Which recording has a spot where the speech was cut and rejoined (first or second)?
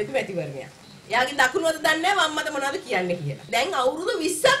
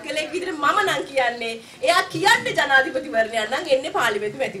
first